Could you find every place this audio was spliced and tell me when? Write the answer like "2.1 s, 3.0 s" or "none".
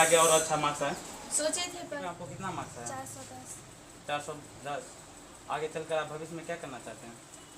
2.0 s